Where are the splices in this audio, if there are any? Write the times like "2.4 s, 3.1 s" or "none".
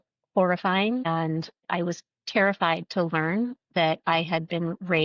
1.2 s